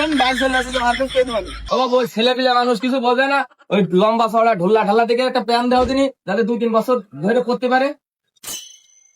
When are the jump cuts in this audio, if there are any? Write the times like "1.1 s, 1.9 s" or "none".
1.6 s